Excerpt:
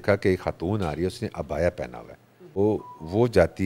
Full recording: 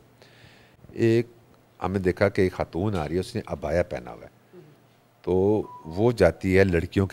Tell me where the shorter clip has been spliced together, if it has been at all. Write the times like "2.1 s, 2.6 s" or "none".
2.6 s